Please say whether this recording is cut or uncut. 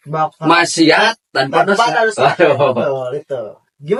uncut